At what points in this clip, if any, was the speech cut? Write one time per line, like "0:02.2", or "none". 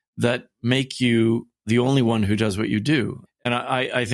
0:01.6
0:03.2